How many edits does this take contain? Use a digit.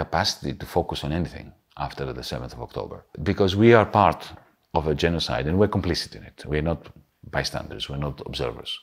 1